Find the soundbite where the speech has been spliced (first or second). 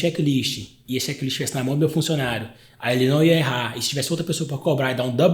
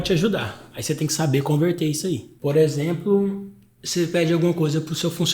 second